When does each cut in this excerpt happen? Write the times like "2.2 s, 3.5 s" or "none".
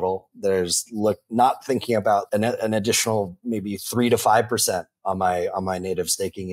2.3 s